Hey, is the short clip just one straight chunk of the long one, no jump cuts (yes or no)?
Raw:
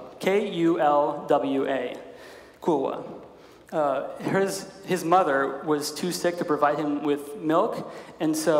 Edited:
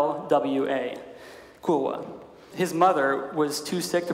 no